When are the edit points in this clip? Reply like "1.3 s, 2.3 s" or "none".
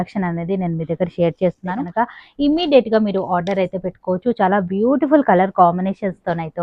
1.8 s